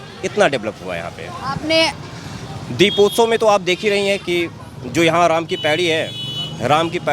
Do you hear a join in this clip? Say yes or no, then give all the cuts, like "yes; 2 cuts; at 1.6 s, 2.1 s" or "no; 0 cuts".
yes; 1 cut; at 2.0 s